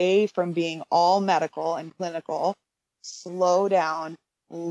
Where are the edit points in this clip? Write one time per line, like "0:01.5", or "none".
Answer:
0:02.7